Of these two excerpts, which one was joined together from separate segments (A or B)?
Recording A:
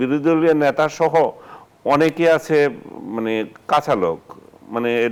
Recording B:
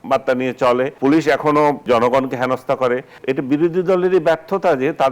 B